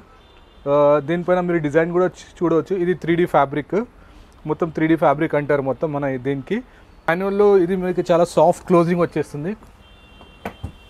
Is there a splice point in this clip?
yes; 1 cut; at 7.1 s

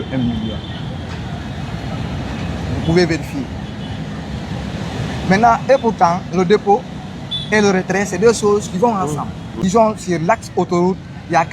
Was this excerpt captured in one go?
no; 1 cut; at 9.4 s

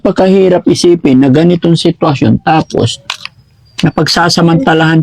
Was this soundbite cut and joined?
no; 0 cuts

